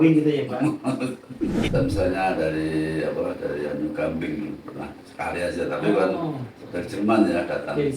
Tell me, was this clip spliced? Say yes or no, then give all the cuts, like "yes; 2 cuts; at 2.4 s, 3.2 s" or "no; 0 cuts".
yes; 1 cut; at 1.7 s